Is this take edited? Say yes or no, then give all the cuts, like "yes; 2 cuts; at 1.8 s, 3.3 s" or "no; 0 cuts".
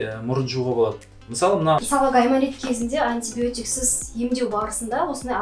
yes; 1 cut; at 1.8 s